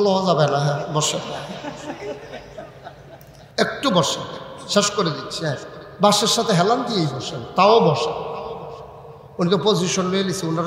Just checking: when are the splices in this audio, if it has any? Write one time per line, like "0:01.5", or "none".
0:03.4

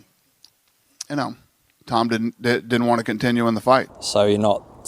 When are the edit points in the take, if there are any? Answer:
0:04.0

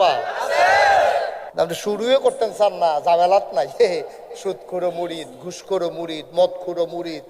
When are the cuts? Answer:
0:01.4

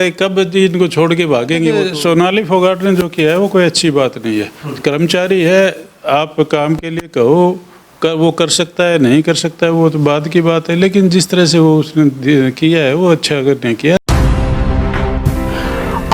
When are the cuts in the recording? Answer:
0:01.8
0:14.0

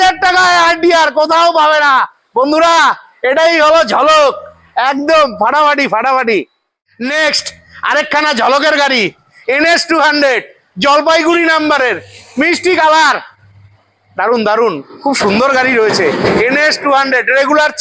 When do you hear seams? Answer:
none

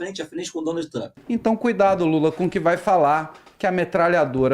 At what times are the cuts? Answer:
0:01.2

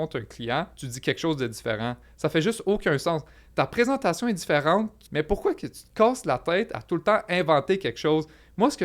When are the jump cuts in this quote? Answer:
0:05.0

